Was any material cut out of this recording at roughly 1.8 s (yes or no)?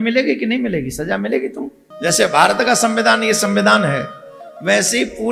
yes